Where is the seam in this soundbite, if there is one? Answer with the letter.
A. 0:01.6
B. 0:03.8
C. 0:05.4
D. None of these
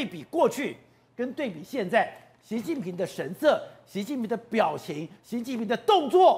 D